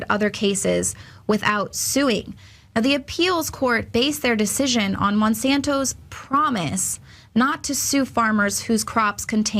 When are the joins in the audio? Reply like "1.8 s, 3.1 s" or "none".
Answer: 4.8 s